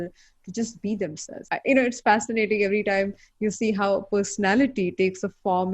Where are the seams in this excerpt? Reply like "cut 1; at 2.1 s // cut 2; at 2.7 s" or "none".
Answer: cut 1; at 1.4 s